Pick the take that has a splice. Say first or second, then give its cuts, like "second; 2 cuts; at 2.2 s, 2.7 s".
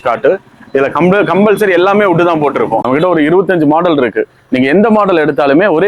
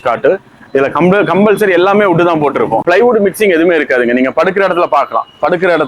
first; 1 cut; at 2.8 s